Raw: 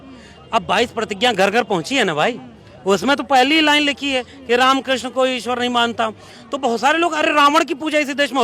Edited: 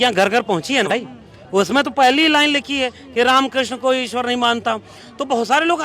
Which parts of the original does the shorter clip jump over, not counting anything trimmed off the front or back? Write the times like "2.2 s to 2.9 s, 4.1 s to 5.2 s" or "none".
2.1 s to 2.2 s